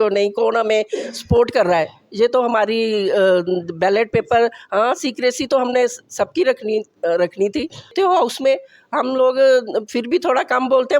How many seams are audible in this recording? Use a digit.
1